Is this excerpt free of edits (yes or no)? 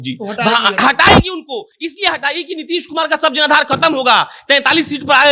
yes